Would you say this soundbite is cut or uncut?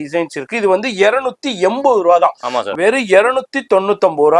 cut